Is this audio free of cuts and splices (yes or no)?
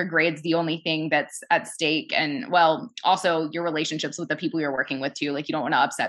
yes